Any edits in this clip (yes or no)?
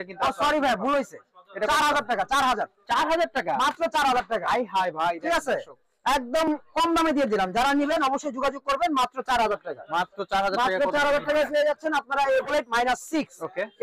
yes